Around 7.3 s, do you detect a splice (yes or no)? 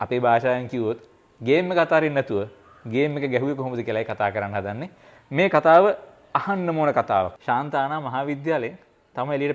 yes